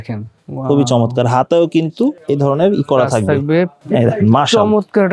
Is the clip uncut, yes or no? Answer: no